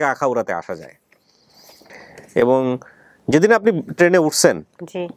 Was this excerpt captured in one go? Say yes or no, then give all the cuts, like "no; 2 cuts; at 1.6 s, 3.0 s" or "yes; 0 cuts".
yes; 0 cuts